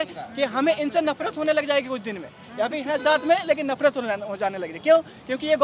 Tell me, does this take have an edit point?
no; 0 cuts

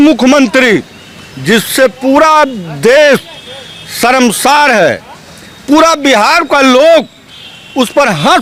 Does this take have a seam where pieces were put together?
no; 0 cuts

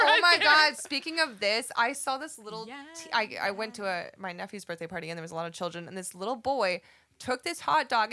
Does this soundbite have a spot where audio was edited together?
no; 0 cuts

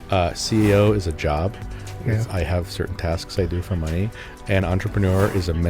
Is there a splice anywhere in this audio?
no; 0 cuts

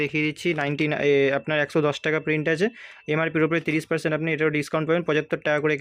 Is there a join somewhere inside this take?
no; 0 cuts

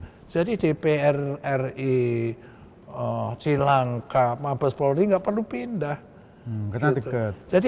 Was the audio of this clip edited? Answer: no; 0 cuts

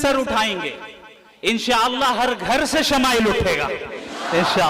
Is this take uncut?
yes; 0 cuts

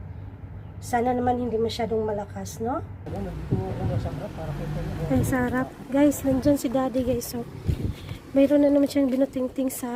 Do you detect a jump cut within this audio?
yes; 1 cut; at 3.0 s

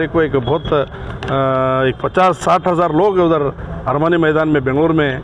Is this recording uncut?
yes; 0 cuts

